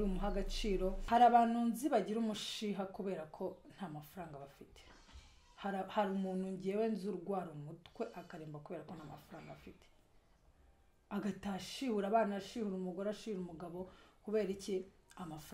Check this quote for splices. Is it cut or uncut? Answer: cut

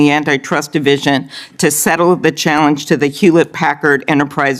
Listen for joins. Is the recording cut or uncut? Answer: uncut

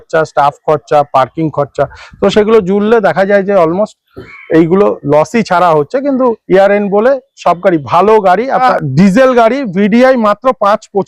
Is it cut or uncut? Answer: cut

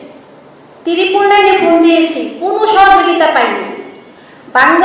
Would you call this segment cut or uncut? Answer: uncut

